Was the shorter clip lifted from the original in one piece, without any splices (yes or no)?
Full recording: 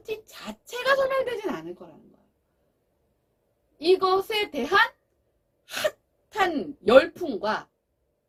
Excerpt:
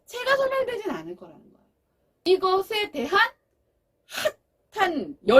no